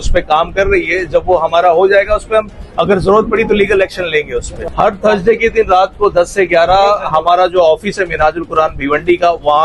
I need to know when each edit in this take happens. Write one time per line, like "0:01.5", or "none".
0:04.5